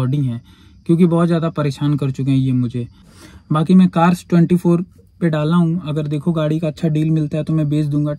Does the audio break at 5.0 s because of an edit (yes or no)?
no